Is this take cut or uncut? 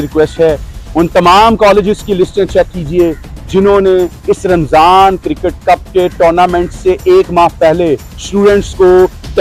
uncut